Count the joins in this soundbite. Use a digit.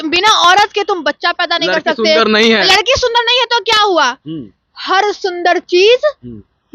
0